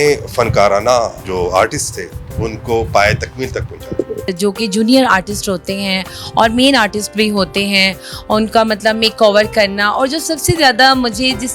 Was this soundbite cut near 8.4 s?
no; 2 cuts; at 1.2 s, 4.3 s

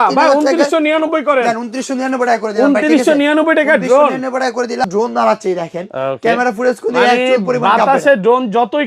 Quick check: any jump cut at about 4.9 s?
yes; 1 cut; at 4.9 s

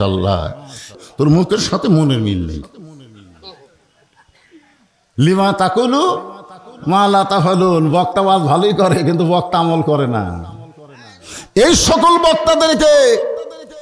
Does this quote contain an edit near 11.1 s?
no; 1 cut; at 0.9 s

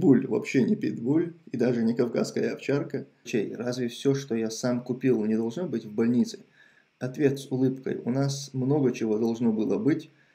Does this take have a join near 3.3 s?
yes; 1 cut; at 3.3 s

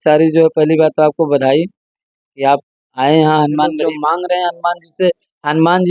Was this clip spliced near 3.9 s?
yes; 1 cut; at 3.9 s

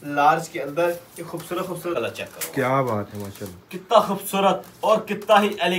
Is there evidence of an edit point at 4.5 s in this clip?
no; 1 cut; at 2.0 s

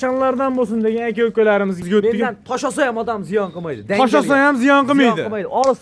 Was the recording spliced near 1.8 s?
yes; 1 cut; at 1.8 s

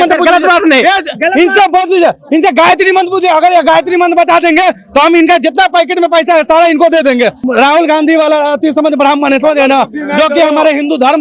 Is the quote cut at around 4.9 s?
no; 1 cut; at 7.4 s

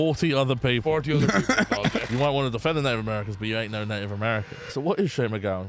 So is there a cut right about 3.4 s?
no; 2 cuts; at 2.1 s, 4.7 s

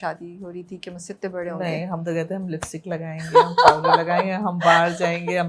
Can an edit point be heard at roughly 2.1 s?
no; 0 cuts

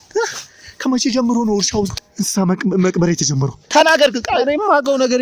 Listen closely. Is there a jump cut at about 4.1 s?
no; 1 cut; at 1.9 s

